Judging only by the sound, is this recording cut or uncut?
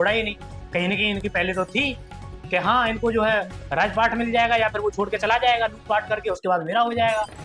uncut